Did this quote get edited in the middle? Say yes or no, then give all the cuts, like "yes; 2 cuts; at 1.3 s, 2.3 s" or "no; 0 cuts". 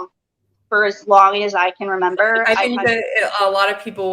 yes; 1 cut; at 2.4 s